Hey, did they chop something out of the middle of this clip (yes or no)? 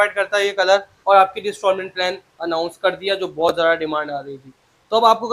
yes